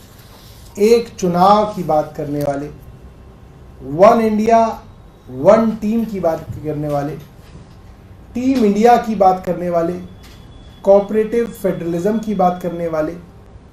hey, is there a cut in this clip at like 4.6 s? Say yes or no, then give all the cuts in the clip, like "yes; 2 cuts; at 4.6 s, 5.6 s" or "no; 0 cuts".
no; 0 cuts